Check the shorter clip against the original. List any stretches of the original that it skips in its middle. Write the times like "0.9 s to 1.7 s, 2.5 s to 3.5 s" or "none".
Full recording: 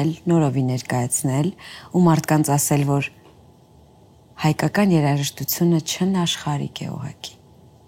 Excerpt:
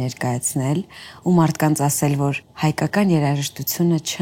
3.1 s to 4.3 s